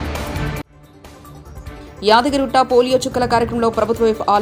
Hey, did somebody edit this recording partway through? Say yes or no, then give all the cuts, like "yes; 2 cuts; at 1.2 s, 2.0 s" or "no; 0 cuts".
no; 0 cuts